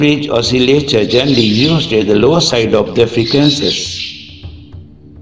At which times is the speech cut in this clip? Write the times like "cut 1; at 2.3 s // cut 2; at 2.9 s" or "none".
cut 1; at 3.9 s